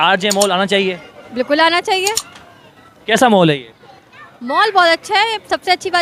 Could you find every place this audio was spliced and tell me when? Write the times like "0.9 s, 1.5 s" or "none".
none